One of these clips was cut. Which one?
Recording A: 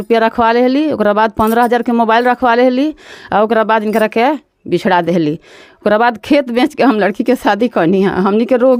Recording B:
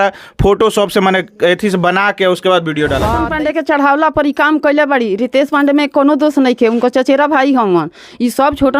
B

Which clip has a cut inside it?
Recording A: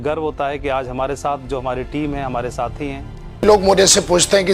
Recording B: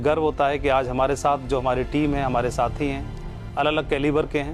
A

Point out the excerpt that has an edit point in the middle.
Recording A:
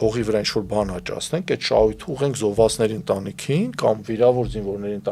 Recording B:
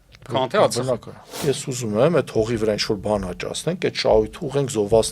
B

